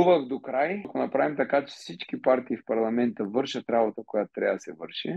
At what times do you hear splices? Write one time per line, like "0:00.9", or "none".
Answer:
0:00.9